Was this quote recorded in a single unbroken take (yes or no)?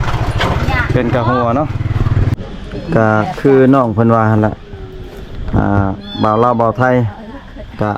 no